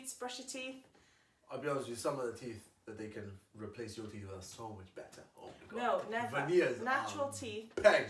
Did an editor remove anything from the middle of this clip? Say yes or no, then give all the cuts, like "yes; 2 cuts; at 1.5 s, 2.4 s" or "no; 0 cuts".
no; 0 cuts